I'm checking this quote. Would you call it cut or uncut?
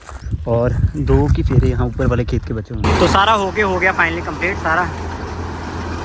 cut